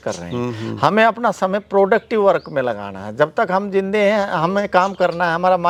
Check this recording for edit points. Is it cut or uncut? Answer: uncut